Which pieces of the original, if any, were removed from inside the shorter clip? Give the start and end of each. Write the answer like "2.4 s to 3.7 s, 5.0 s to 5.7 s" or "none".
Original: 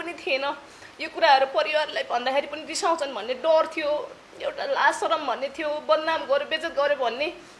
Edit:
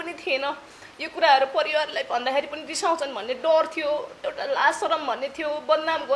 4.2 s to 4.4 s